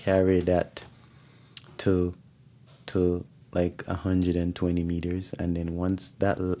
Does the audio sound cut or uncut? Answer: uncut